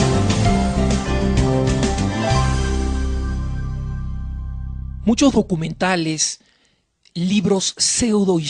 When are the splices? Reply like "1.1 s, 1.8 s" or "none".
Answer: none